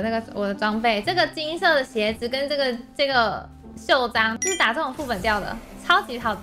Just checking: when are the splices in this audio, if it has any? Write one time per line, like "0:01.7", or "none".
0:04.4